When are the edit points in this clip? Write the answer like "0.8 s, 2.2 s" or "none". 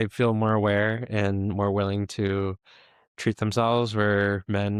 none